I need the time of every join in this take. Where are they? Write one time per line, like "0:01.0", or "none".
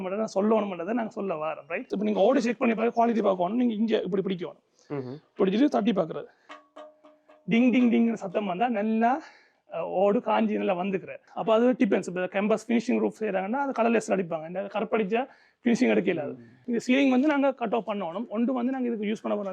0:01.9
0:11.2
0:16.6